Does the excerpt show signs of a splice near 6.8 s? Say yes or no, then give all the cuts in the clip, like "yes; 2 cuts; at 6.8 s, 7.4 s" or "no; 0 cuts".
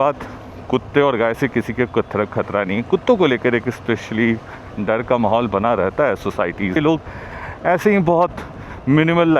yes; 1 cut; at 6.8 s